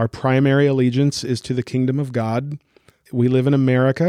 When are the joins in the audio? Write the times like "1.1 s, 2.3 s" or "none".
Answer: 3.0 s